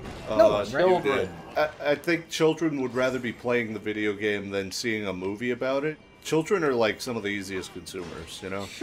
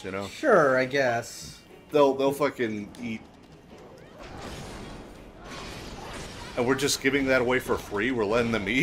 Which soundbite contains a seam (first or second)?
first